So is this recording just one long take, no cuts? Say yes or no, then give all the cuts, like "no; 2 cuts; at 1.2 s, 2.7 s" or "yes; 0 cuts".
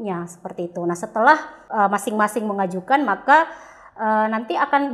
no; 1 cut; at 1.6 s